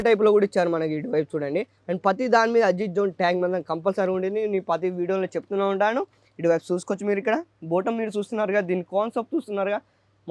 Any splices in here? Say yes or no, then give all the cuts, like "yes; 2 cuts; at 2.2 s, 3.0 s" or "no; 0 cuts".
no; 0 cuts